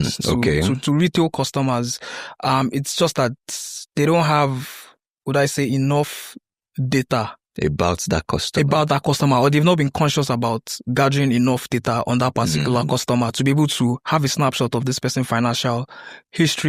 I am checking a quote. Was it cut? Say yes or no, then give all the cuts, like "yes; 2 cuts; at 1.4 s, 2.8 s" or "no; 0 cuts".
no; 0 cuts